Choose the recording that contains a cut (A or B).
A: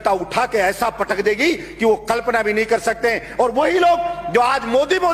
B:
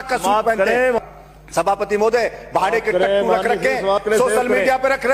B